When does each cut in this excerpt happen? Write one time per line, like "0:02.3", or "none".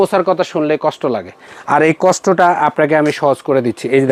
none